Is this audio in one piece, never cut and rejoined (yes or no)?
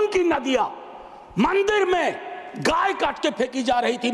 yes